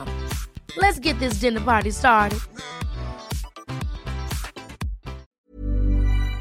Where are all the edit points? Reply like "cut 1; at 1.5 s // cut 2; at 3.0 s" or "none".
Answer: cut 1; at 5.3 s